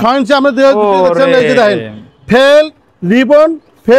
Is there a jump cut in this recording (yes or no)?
no